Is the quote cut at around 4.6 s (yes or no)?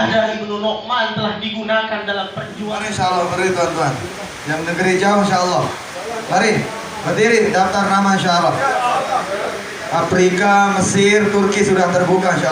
no